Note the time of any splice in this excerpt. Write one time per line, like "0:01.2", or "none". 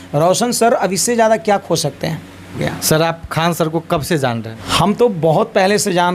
0:02.7
0:04.6